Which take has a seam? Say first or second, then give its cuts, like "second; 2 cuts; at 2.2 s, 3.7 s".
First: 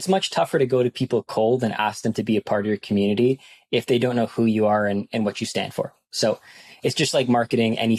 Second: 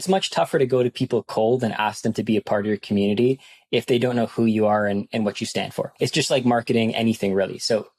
second; 1 cut; at 5.9 s